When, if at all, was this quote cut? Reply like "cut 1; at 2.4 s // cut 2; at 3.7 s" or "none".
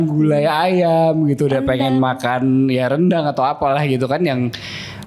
none